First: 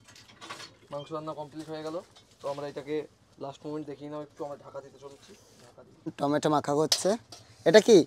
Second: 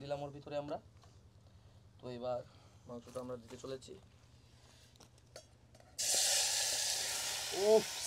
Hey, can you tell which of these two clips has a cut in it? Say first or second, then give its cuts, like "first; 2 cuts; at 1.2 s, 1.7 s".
first; 1 cut; at 6.1 s